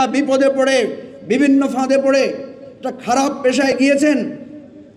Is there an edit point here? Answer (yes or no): no